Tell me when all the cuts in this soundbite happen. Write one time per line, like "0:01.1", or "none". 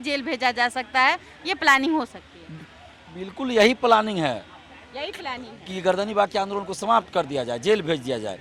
none

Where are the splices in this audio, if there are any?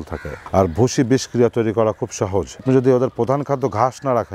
0:02.6

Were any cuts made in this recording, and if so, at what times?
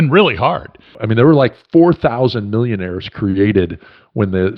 0:00.9

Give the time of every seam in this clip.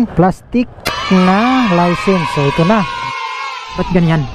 0:03.3

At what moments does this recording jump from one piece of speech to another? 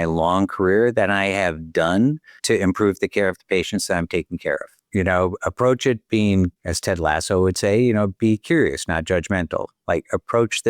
0:06.7

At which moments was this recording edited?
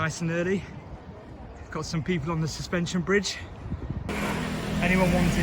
0:04.1

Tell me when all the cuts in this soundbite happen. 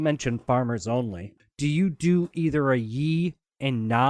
0:01.4

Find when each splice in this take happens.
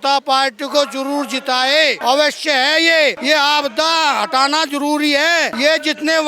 0:02.0
0:03.2
0:05.5

